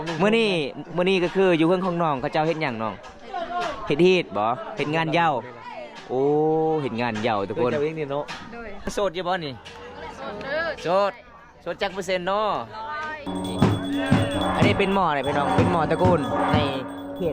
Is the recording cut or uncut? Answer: cut